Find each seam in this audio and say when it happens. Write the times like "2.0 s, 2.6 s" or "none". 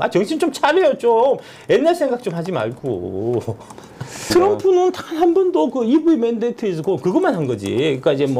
4.3 s